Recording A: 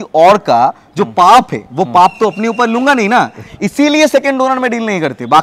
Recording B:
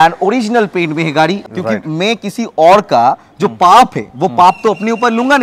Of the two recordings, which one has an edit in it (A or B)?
B